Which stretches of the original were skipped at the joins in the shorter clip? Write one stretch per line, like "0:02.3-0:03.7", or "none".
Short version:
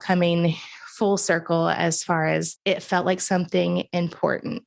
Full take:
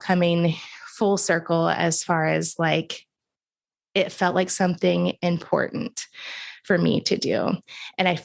0:02.5-0:03.8